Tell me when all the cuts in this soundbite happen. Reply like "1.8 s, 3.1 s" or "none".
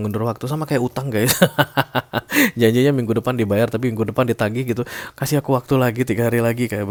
none